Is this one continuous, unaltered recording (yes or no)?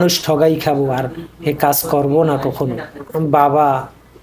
no